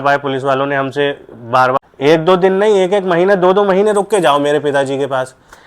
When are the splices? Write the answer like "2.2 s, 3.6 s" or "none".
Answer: 1.9 s

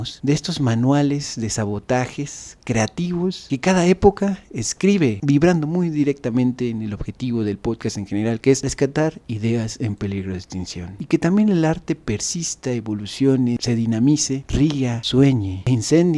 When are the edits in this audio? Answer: 5.2 s, 11.0 s

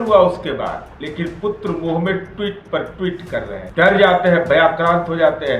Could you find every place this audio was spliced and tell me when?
0.9 s, 3.6 s

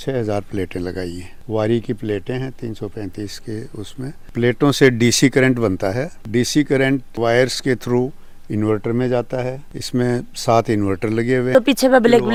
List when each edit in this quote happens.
none

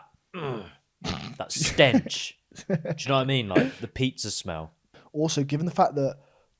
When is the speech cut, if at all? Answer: 5.0 s

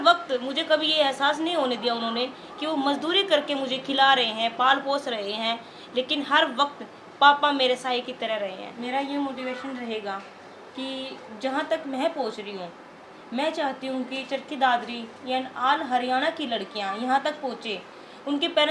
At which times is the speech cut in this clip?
8.7 s

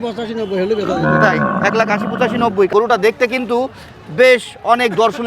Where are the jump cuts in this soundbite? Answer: 2.7 s

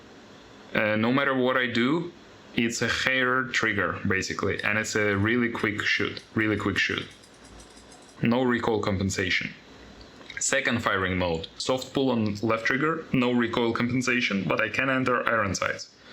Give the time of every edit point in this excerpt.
11.5 s

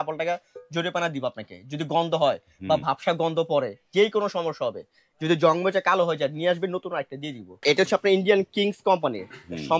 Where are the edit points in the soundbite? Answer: 7.6 s

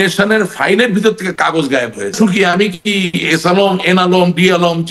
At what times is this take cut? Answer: 2.1 s

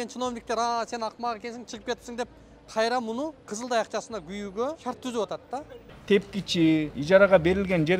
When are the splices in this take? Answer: 3.4 s, 4.8 s, 5.9 s, 7.0 s

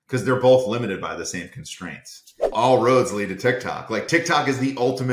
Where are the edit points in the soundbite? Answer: 2.5 s

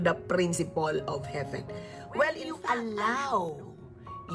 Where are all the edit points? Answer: 2.6 s

